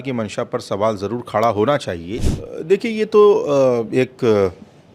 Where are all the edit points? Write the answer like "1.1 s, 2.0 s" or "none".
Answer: 2.2 s

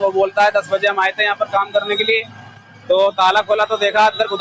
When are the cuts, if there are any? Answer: none

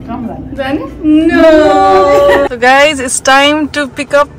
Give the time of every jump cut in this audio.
2.5 s

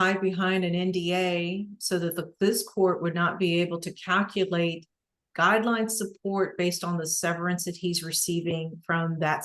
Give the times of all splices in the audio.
none

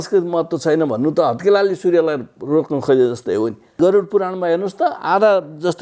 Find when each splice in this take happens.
3.7 s

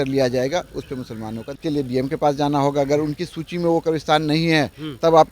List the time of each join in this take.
1.5 s

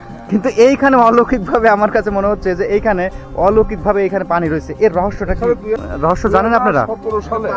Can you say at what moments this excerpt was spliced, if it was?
5.8 s

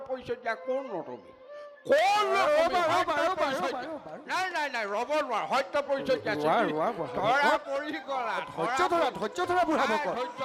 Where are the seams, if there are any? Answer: none

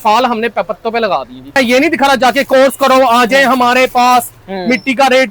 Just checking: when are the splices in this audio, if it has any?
1.6 s

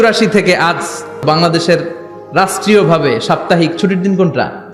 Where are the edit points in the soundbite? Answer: 1.2 s

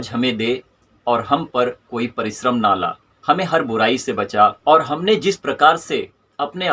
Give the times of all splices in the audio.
4.6 s

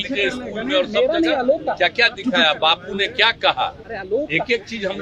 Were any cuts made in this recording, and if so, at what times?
none

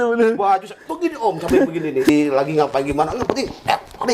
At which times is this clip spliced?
2.1 s

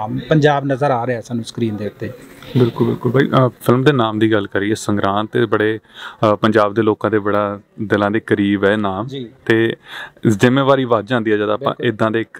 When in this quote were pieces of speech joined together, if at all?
none

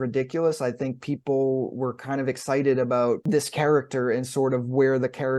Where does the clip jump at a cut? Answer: 3.2 s

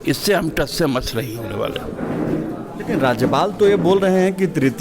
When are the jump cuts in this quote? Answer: none

